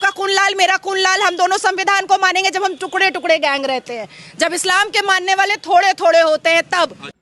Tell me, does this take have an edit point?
no; 0 cuts

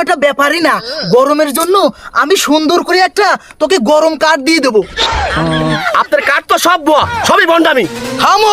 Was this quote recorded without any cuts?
no; 1 cut; at 5.8 s

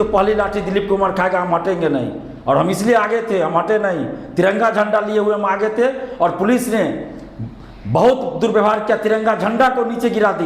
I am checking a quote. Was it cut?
no; 0 cuts

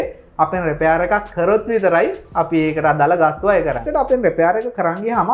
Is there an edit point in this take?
yes; 1 cut; at 3.8 s

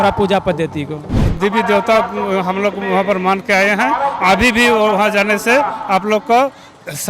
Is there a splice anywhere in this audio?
yes; 1 cut; at 1.3 s

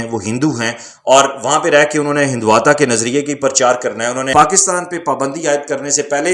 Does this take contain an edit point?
yes; 1 cut; at 4.3 s

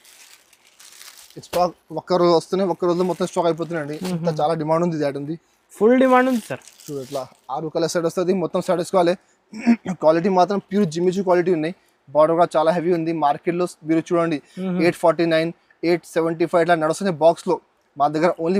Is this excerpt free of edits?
yes; 0 cuts

